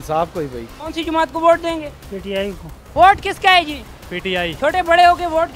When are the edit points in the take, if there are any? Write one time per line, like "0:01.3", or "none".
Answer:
0:04.5